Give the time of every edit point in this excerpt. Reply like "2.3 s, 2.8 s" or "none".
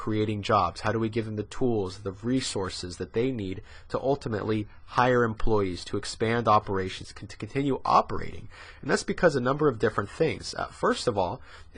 none